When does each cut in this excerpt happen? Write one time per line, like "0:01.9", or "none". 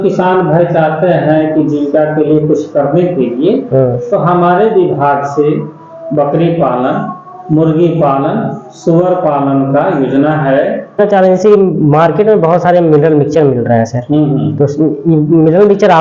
0:11.0